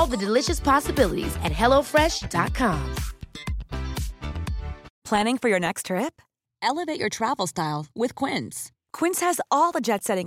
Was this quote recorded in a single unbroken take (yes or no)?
no